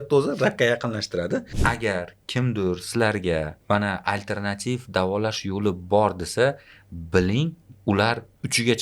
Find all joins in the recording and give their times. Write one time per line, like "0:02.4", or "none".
0:01.5
0:03.6